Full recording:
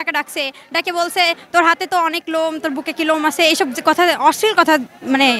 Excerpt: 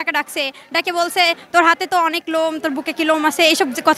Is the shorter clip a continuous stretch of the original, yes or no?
yes